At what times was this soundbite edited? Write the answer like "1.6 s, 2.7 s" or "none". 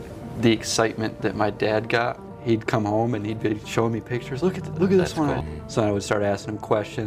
2.3 s, 5.5 s